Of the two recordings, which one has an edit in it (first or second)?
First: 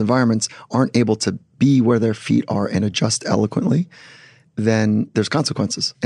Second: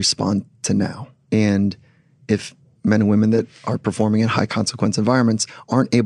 second